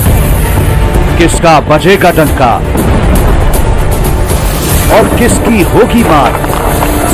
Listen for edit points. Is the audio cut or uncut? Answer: uncut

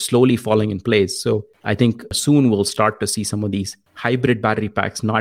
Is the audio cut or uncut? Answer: cut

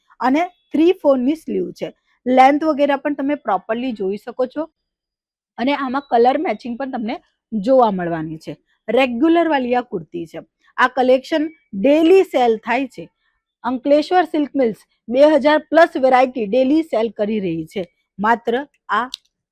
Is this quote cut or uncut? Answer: uncut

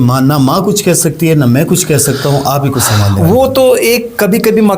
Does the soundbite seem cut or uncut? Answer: uncut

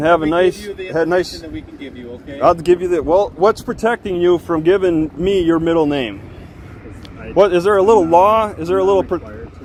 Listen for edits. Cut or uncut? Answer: uncut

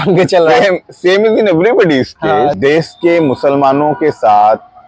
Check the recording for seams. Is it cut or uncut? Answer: cut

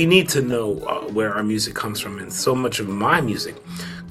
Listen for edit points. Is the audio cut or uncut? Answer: uncut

